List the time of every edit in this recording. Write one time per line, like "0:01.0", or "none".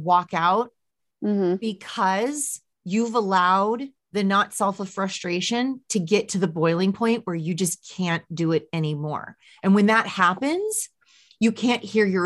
0:04.0